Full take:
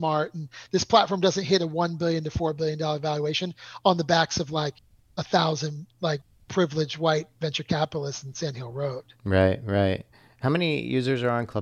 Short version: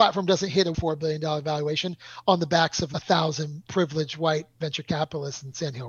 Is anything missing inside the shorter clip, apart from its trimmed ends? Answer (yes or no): yes